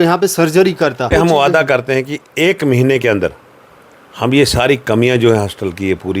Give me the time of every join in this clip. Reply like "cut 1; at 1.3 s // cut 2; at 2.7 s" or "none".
cut 1; at 1.1 s